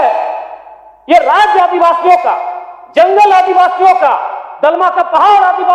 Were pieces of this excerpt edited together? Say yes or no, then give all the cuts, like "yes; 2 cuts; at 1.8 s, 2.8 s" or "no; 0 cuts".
no; 0 cuts